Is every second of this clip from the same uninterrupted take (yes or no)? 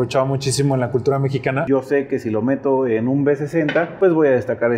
no